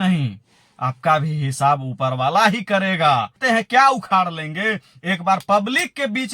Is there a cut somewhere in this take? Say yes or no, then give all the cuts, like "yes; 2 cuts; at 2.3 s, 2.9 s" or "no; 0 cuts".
yes; 1 cut; at 3.4 s